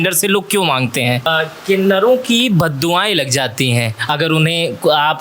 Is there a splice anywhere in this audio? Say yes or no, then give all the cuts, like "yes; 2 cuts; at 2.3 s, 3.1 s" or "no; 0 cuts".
yes; 1 cut; at 1.2 s